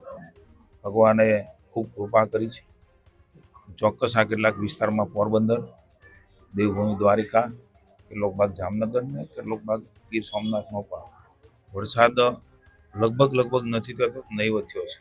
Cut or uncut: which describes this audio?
uncut